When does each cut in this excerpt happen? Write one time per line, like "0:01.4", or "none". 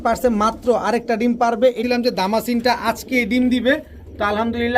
0:01.8